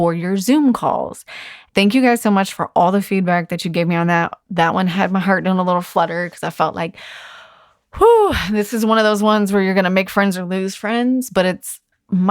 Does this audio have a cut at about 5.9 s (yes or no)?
no